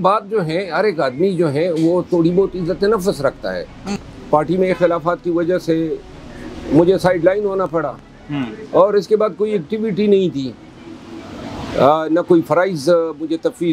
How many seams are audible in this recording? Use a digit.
1